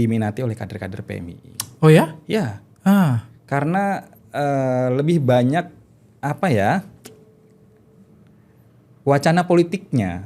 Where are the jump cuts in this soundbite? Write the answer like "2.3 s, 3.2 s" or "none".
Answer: none